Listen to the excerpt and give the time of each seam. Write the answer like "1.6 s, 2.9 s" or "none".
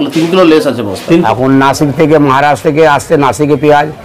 1.2 s